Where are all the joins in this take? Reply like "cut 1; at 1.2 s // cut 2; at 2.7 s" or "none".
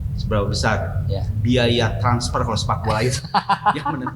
none